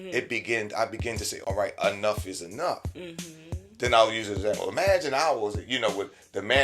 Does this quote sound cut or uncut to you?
cut